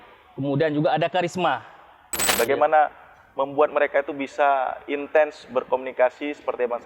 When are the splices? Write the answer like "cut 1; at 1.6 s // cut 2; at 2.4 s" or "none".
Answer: cut 1; at 2.2 s